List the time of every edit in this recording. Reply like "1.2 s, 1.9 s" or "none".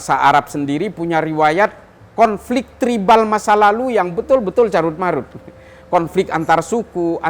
none

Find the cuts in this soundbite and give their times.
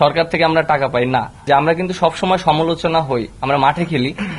1.4 s

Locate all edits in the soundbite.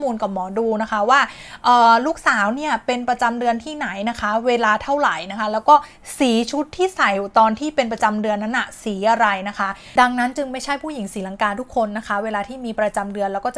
9.8 s

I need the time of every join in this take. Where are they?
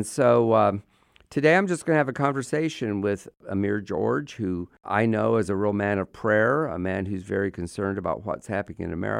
3.4 s, 4.7 s

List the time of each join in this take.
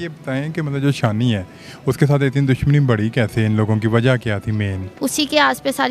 4.8 s

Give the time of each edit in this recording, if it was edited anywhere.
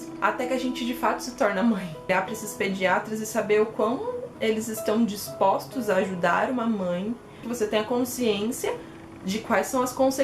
2.1 s, 7.4 s

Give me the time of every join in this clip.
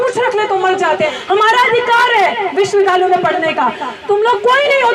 1.2 s

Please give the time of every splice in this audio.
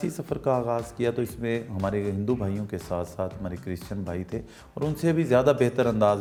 none

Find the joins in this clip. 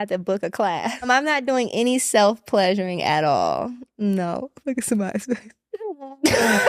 1.1 s

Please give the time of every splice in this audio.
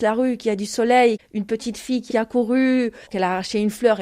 1.2 s, 3.0 s

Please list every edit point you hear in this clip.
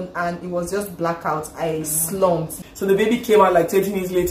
2.5 s

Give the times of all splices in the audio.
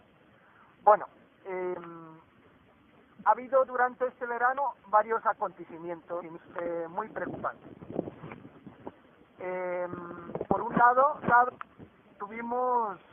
none

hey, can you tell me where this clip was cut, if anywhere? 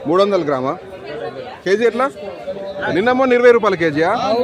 2.8 s

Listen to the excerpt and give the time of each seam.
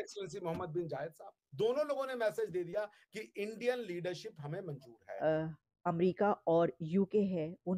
5.1 s

